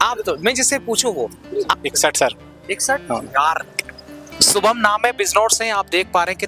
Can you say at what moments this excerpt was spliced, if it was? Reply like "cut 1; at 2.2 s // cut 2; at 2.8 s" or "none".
cut 1; at 1.7 s